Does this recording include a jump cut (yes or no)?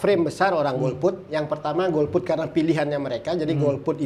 no